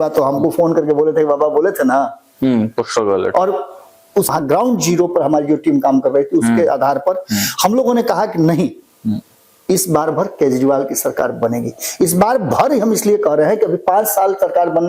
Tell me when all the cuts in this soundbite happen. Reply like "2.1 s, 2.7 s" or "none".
4.3 s